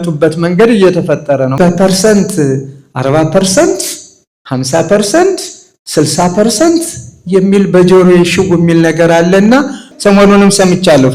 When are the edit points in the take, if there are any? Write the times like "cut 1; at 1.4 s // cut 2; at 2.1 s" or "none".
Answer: cut 1; at 1.5 s // cut 2; at 9.8 s